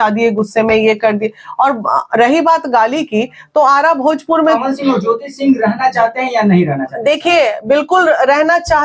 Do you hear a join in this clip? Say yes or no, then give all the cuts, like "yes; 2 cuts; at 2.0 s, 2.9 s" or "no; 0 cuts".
yes; 1 cut; at 4.6 s